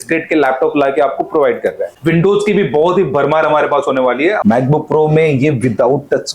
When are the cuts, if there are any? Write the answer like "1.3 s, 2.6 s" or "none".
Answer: 1.9 s, 4.4 s